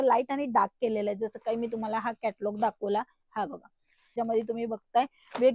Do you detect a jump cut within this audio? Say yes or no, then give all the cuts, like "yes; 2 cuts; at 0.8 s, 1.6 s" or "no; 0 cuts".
yes; 1 cut; at 4.2 s